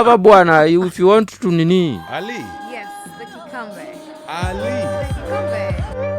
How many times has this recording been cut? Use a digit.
1